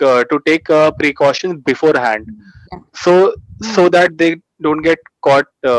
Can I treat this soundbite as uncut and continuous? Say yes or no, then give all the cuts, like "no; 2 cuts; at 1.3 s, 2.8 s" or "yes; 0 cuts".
yes; 0 cuts